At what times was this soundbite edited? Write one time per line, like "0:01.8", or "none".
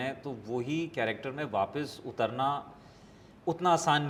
none